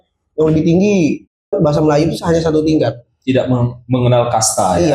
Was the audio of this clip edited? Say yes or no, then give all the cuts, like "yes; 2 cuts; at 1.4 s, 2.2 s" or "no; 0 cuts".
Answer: yes; 1 cut; at 1.5 s